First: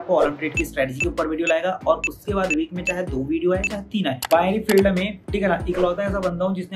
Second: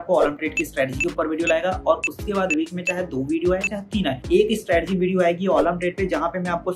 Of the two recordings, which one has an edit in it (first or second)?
first